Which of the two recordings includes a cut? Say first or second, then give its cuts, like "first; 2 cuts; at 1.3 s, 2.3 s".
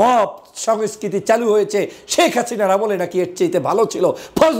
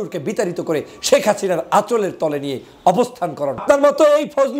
second; 1 cut; at 3.6 s